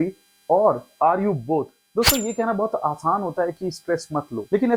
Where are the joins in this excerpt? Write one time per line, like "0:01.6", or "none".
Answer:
0:01.8